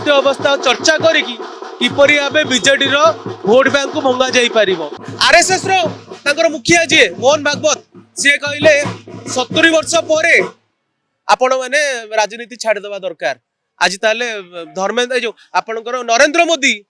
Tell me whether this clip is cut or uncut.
cut